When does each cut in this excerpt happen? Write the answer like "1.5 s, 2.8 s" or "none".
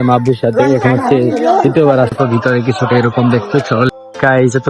2.2 s, 3.9 s